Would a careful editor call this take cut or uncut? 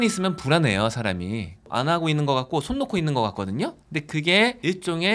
uncut